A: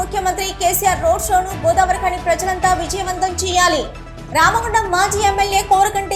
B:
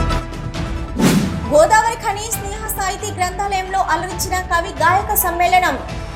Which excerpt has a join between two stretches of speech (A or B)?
B